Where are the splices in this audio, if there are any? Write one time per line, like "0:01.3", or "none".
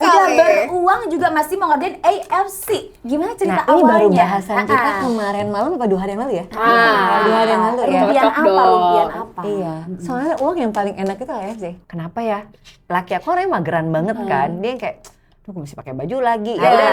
0:11.7